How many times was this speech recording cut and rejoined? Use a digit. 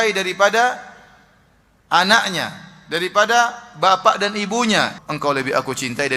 1